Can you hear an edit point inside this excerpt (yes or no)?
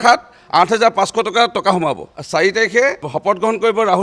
yes